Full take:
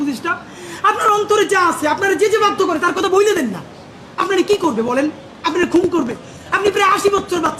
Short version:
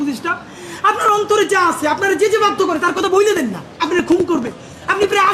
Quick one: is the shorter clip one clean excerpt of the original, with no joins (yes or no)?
no